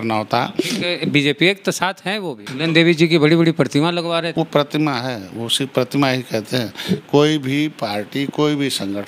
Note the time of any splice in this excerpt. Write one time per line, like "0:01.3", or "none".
0:02.4
0:04.3